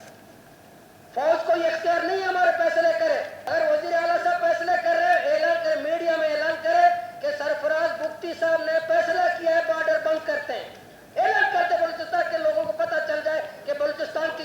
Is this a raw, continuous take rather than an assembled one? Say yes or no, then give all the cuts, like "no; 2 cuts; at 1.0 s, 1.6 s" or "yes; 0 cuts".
no; 1 cut; at 3.4 s